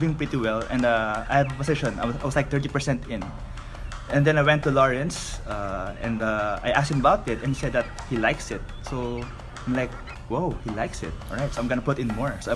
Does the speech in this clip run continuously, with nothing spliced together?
yes; 0 cuts

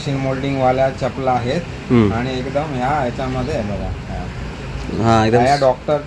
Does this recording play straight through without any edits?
yes; 0 cuts

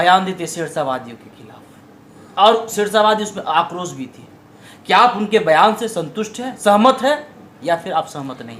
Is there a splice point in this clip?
no; 0 cuts

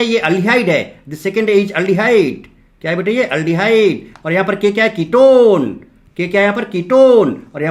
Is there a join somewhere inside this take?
no; 0 cuts

